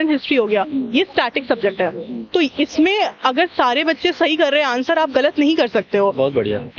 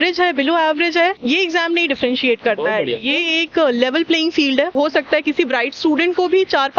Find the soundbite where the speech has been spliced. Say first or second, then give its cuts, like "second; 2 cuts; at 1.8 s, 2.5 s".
second; 2 cuts; at 1.2 s, 4.8 s